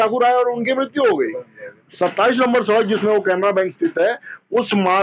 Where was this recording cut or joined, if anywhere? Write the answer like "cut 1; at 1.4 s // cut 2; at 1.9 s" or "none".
cut 1; at 1.8 s